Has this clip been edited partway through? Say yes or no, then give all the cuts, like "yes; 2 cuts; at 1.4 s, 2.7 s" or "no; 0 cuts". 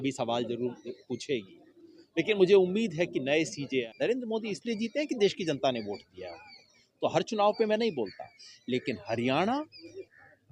yes; 1 cut; at 3.9 s